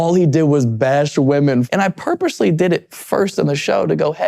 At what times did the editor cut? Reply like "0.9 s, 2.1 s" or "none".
1.7 s